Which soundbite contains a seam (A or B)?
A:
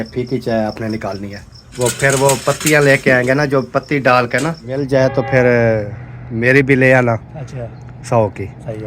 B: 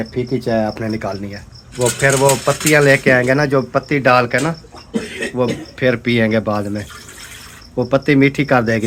A